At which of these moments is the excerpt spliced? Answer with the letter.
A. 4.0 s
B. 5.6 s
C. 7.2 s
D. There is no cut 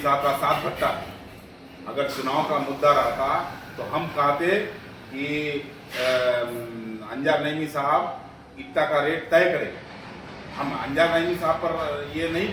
D